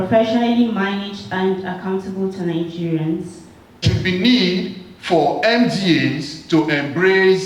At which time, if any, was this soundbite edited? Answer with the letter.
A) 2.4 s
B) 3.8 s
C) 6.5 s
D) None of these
B